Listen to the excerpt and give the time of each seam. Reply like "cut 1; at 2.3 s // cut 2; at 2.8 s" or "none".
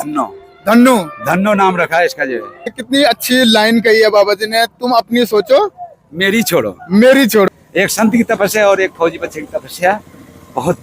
cut 1; at 2.7 s // cut 2; at 7.5 s